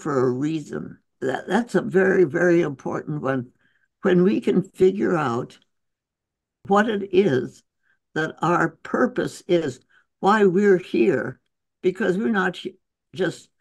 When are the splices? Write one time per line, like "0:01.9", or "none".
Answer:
0:01.1
0:06.6